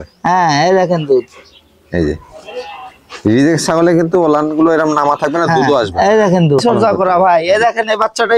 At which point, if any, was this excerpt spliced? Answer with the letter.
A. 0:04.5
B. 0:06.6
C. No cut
B